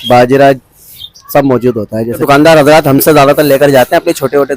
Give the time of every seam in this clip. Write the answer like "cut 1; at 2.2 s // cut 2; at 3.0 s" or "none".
cut 1; at 2.2 s